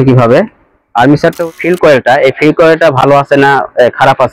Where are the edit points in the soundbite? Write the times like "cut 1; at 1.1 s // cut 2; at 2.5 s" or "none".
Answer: cut 1; at 1.5 s